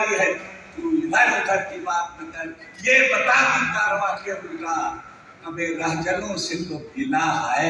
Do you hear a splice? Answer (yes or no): no